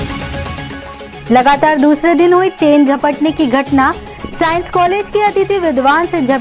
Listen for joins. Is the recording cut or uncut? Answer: cut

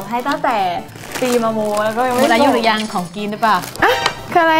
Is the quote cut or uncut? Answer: cut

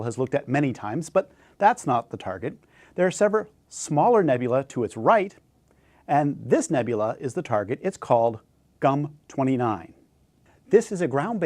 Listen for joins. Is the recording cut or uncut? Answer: cut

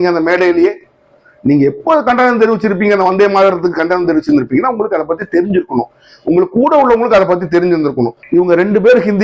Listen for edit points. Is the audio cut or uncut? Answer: cut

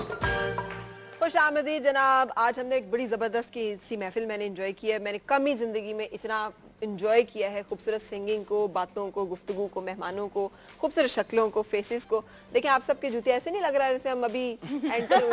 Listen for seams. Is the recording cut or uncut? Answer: uncut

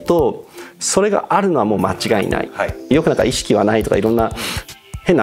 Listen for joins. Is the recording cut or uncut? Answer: cut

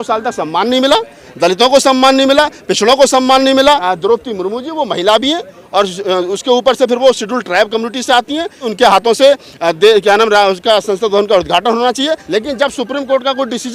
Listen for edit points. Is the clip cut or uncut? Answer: cut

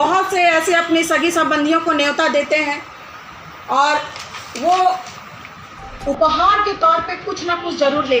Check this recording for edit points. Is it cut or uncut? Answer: uncut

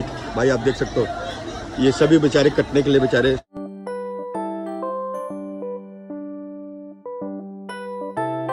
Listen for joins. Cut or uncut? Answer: uncut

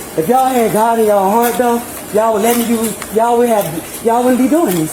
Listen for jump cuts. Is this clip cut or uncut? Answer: uncut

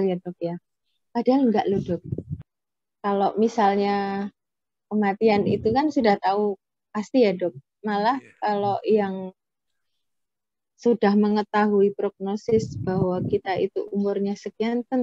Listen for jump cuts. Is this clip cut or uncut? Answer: cut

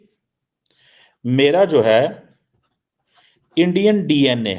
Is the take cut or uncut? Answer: uncut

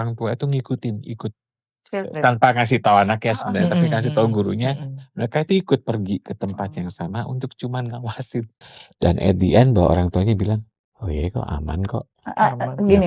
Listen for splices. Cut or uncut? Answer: uncut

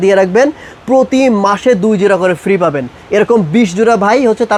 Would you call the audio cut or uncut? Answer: uncut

